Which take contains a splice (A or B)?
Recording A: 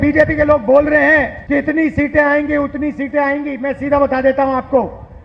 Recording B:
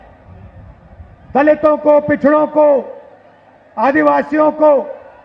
A